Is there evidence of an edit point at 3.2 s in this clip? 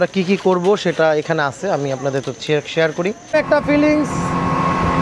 yes; 1 cut; at 3.2 s

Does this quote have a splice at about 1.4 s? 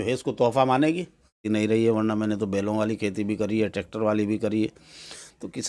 yes; 1 cut; at 1.4 s

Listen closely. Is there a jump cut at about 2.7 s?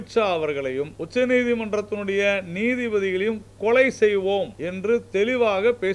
no; 2 cuts; at 1.0 s, 4.6 s

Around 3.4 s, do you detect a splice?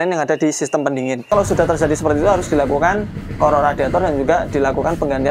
no; 1 cut; at 1.3 s

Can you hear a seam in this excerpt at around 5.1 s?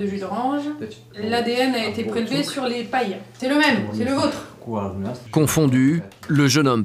yes; 2 cuts; at 3.2 s, 5.1 s

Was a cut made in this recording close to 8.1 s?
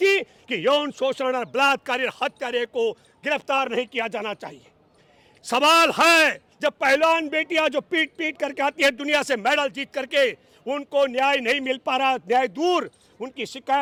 no; 0 cuts

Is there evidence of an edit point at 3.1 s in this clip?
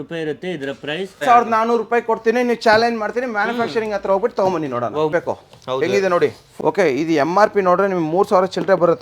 no; 3 cuts; at 1.2 s, 5.1 s, 6.4 s

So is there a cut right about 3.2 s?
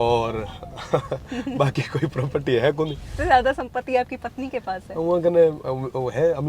yes; 1 cut; at 3.2 s

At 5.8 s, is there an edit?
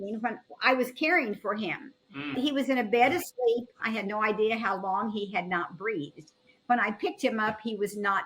no; 2 cuts; at 2.3 s, 3.8 s

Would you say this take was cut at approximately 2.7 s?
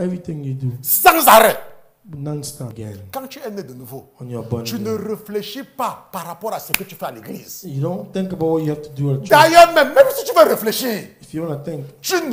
yes; 1 cut; at 2.7 s

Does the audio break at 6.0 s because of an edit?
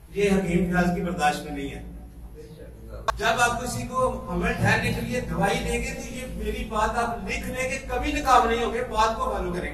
no; 1 cut; at 2.9 s

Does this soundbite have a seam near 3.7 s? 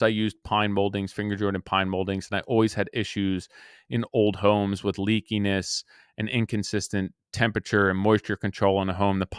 no; 0 cuts

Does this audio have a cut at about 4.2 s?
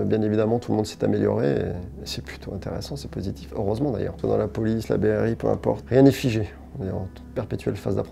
yes; 2 cuts; at 4.2 s, 5.8 s

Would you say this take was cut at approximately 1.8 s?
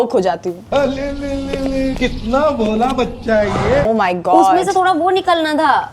no; 1 cut; at 3.9 s

